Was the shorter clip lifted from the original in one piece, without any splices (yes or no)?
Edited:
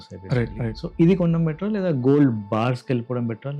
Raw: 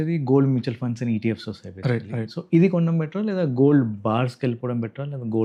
yes